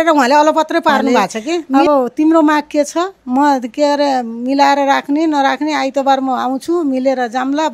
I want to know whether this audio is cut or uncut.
cut